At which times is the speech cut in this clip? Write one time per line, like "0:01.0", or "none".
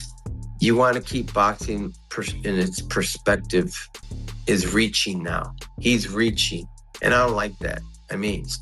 0:04.0

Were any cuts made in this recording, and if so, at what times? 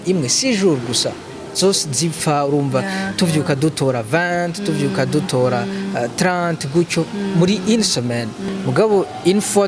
0:08.4

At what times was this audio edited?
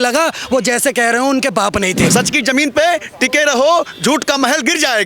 0:02.1

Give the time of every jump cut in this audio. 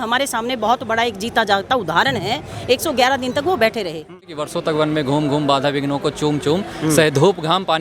0:04.3

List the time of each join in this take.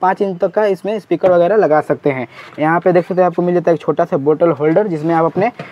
none

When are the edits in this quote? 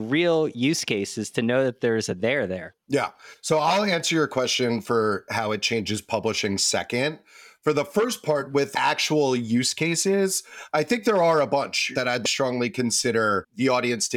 none

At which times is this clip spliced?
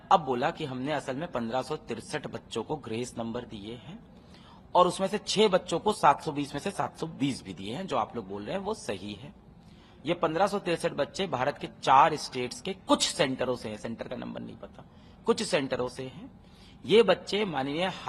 none

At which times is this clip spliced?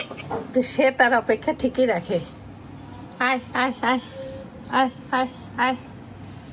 none

